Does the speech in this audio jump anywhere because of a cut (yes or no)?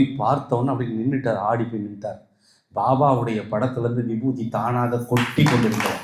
no